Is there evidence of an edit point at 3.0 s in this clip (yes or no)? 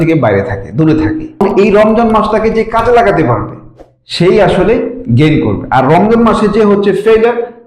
no